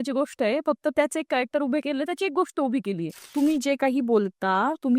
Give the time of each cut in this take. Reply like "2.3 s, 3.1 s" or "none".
3.3 s